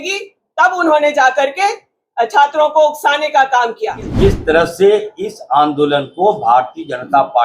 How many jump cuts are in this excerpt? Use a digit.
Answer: 1